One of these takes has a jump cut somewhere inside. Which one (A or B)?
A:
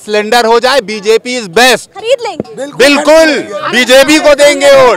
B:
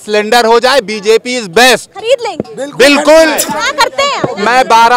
B